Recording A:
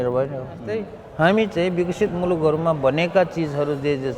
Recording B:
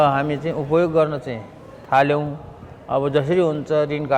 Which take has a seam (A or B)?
A